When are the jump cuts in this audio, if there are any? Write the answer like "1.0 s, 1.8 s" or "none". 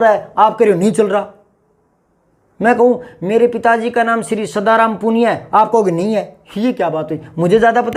none